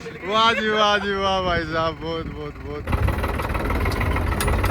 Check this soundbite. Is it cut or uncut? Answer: cut